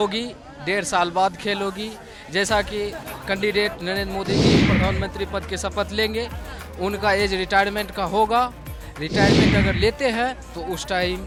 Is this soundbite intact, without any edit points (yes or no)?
yes